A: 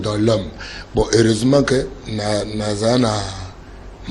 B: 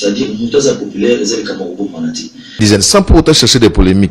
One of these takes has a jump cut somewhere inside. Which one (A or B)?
B